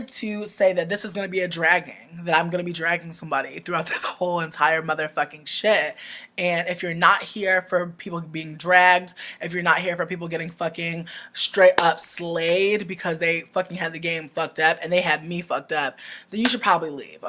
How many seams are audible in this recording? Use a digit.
1